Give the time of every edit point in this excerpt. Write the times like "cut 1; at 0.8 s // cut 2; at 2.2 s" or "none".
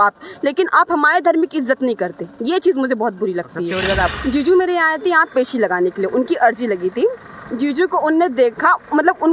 cut 1; at 4.1 s